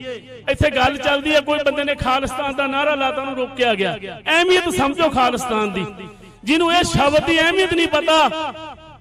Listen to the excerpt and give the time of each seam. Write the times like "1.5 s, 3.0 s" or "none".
none